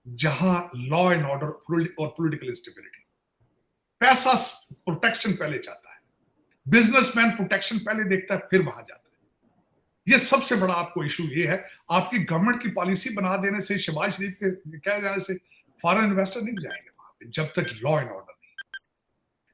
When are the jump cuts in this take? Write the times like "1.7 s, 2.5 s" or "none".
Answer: none